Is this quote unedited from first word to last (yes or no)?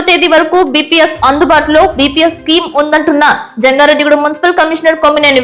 yes